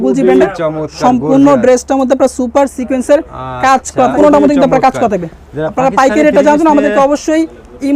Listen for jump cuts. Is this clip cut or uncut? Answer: cut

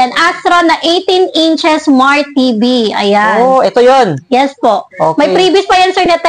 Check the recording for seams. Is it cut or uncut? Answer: uncut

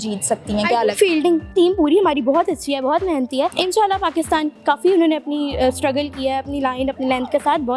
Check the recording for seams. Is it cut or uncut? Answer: cut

